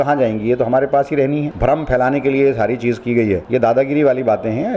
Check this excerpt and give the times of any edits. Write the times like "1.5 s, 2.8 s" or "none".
1.5 s, 3.4 s